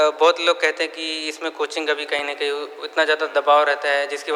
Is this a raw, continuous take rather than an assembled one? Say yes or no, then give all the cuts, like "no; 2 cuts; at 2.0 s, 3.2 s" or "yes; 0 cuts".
yes; 0 cuts